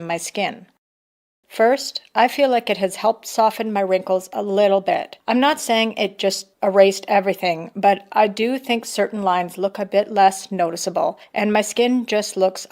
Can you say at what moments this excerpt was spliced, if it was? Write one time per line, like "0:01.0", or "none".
none